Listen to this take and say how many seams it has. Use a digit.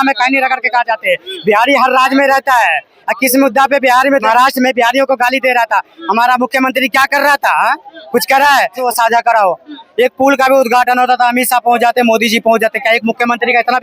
2